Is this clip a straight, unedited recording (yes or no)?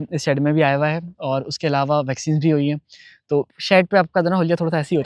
yes